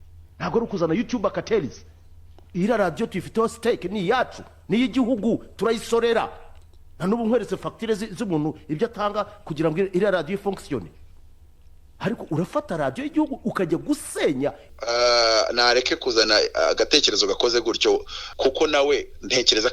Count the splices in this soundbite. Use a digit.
2